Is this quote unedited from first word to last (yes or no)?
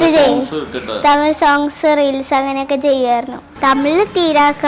no